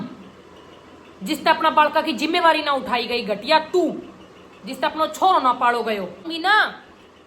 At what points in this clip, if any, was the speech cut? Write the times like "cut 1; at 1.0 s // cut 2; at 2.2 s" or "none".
cut 1; at 6.3 s

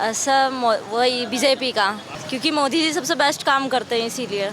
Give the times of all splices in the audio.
cut 1; at 2.1 s

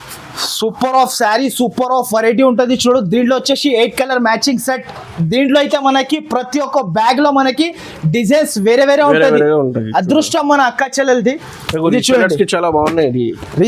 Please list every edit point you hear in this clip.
none

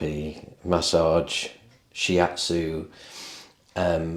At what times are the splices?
none

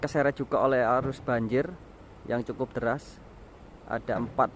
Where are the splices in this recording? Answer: none

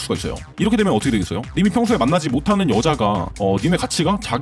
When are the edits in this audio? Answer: cut 1; at 1.4 s

